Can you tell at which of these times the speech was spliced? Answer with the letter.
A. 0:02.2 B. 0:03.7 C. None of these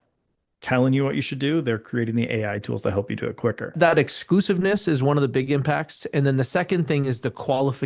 B